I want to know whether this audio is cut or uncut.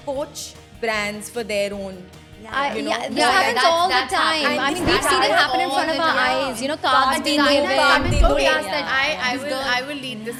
uncut